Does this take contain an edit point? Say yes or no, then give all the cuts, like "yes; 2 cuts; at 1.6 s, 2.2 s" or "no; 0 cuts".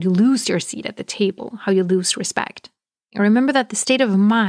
yes; 1 cut; at 3.1 s